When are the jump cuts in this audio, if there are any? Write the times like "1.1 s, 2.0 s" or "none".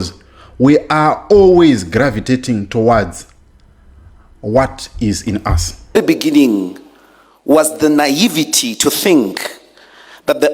6.0 s